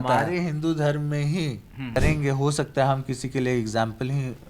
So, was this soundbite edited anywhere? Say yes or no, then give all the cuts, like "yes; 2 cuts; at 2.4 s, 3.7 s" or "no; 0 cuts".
yes; 1 cut; at 2.0 s